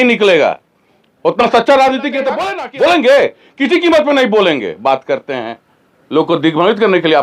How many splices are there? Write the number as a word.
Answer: one